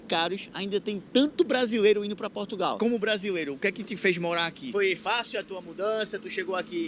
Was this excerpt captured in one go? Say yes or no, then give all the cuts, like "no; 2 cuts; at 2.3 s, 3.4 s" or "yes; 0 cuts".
no; 2 cuts; at 2.8 s, 4.6 s